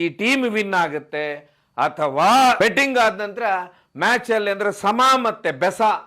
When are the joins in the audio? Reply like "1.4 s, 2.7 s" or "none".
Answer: 2.6 s